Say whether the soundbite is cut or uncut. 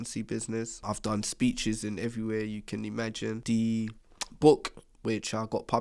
cut